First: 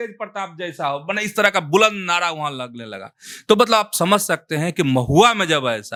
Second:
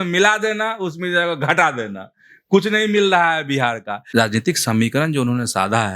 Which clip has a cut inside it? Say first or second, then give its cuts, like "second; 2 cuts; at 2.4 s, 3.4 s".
second; 1 cut; at 4.0 s